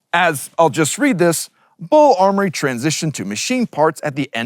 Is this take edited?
no; 0 cuts

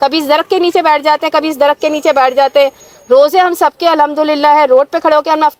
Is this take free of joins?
yes; 0 cuts

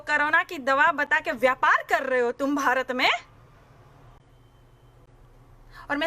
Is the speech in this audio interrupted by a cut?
no; 0 cuts

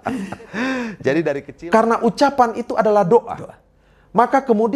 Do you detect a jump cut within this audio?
yes; 1 cut; at 1.5 s

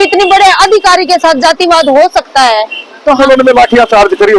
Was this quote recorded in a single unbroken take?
no; 1 cut; at 3.2 s

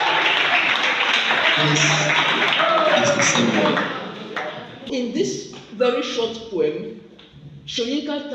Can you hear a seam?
yes; 1 cut; at 4.9 s

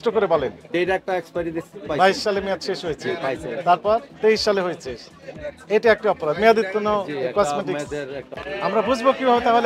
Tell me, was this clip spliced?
yes; 1 cut; at 8.3 s

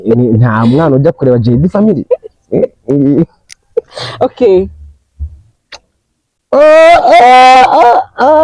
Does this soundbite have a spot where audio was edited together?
no; 0 cuts

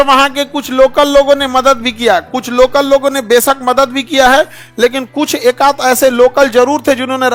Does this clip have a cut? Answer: no; 0 cuts

